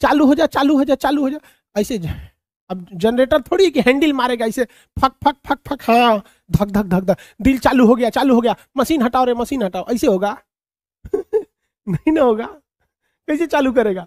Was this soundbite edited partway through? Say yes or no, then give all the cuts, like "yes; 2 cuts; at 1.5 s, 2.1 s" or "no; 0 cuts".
no; 0 cuts